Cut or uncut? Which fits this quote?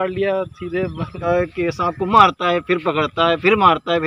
cut